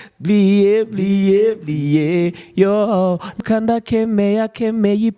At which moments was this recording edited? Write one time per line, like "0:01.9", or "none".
0:03.4